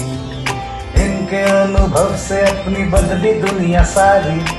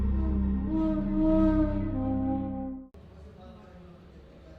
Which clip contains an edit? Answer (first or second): second